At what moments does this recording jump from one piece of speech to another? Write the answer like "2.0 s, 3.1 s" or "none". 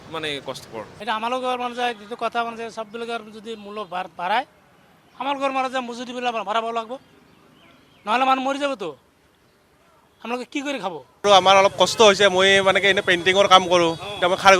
0.9 s, 11.1 s